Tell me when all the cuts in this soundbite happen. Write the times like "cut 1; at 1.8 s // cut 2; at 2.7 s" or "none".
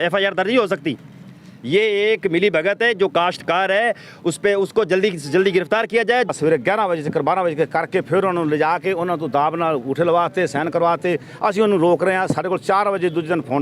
cut 1; at 6.3 s